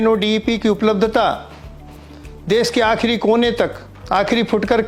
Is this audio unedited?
yes; 0 cuts

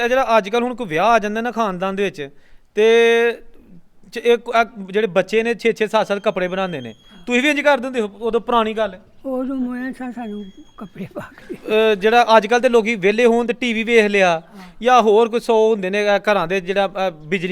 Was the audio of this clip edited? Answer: yes; 1 cut; at 11.5 s

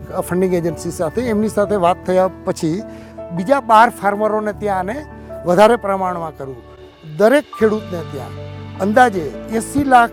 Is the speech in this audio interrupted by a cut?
no; 0 cuts

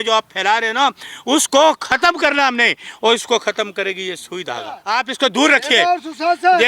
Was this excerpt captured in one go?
no; 1 cut; at 4.8 s

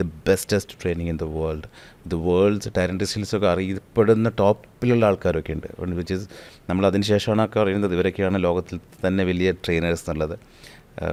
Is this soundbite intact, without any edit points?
yes; 0 cuts

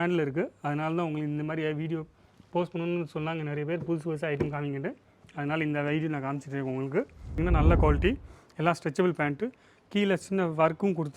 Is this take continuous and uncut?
no; 1 cut; at 7.4 s

